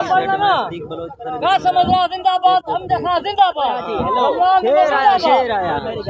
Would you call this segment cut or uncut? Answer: uncut